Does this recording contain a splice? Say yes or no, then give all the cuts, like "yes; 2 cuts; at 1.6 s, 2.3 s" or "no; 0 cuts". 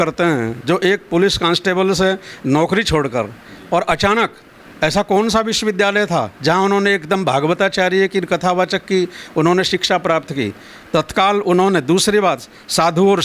no; 0 cuts